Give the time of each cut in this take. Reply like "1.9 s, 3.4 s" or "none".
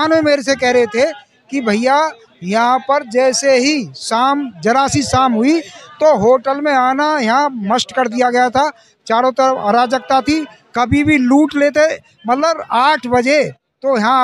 none